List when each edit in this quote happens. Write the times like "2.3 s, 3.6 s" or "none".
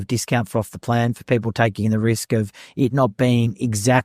none